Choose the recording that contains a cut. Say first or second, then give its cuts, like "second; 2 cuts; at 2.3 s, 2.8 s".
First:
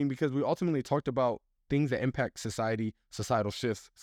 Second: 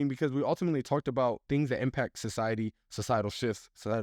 second; 1 cut; at 1.4 s